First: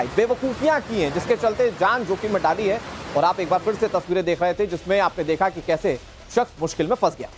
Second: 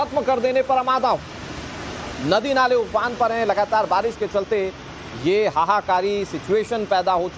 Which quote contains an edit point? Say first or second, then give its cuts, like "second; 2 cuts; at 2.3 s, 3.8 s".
second; 1 cut; at 3.5 s